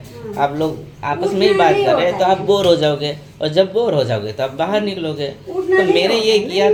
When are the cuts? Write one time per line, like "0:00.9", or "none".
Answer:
none